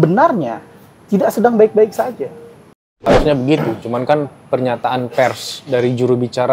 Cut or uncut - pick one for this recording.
cut